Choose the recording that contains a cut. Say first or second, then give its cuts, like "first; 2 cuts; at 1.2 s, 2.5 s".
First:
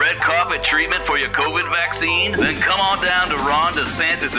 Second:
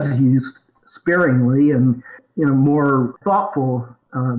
second; 1 cut; at 3.2 s